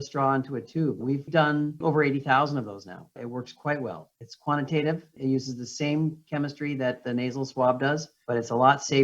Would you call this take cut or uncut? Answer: cut